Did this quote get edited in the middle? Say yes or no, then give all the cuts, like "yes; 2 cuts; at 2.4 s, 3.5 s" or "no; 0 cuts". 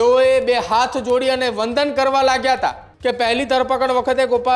yes; 1 cut; at 2.9 s